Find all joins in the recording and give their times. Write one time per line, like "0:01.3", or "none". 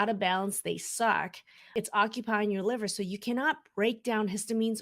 0:01.7